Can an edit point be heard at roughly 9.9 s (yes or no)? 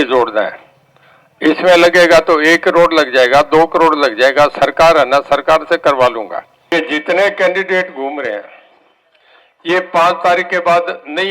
no